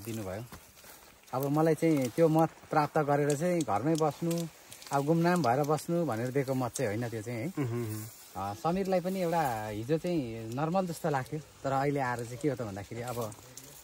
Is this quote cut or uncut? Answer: uncut